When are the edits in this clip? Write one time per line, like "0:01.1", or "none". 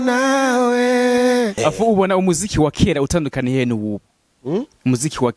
0:01.5